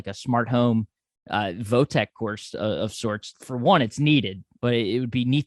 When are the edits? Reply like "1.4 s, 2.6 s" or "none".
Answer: 3.2 s, 4.5 s